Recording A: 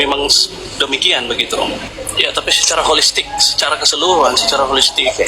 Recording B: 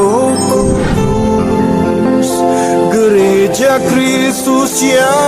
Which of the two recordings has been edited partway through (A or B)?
A